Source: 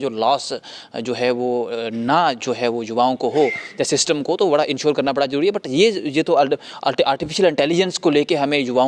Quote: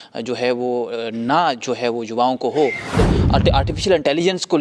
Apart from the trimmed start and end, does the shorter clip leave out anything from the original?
yes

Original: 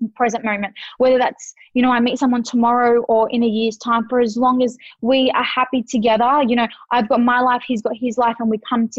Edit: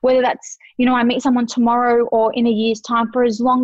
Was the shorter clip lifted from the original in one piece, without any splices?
yes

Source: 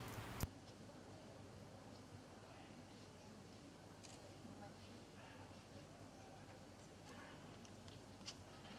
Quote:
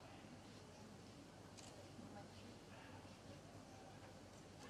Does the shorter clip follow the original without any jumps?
yes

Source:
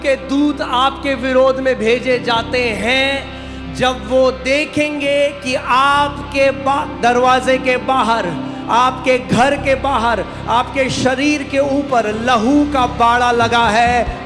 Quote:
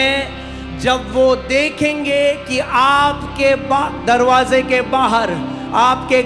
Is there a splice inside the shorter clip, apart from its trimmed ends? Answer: no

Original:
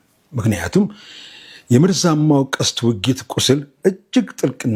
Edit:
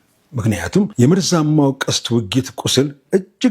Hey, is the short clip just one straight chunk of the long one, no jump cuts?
no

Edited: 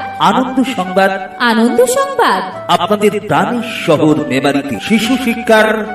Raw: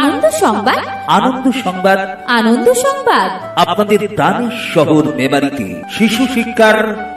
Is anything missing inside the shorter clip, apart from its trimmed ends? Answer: yes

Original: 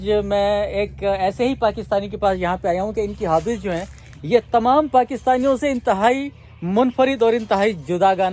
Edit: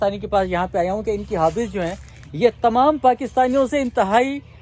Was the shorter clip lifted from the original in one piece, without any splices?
yes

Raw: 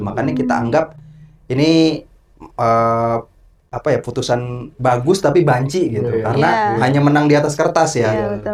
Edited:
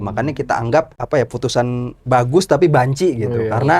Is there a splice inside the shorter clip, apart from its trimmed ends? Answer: yes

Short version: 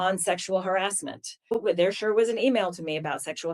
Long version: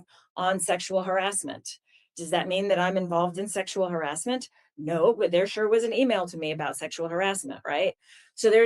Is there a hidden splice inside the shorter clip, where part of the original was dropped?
yes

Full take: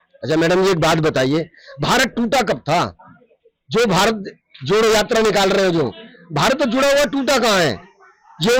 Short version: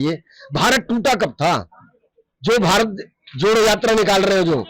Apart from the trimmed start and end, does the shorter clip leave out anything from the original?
no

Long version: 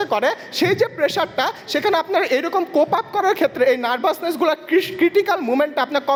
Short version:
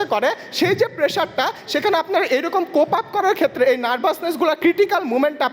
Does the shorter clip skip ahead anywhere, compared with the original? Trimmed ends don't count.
yes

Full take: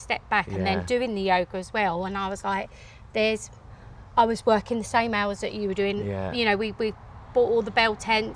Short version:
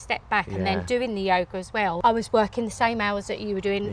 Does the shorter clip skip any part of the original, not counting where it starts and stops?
yes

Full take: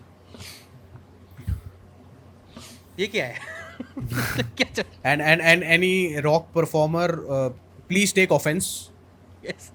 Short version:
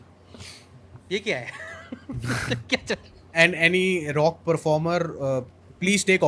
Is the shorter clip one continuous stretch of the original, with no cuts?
no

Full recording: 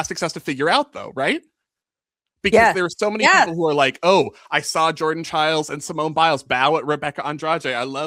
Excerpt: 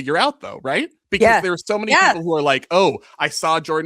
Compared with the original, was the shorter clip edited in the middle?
yes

